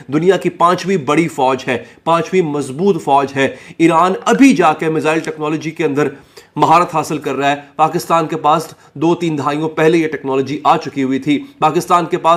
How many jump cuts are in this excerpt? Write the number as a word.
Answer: zero